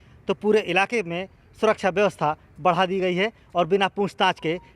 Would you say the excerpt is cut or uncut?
uncut